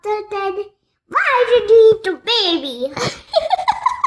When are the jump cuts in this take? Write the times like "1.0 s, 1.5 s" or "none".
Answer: none